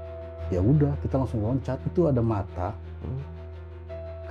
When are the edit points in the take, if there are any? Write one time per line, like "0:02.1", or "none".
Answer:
0:01.8